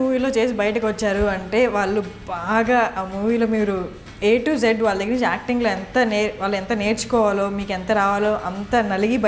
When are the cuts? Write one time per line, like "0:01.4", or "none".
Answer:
none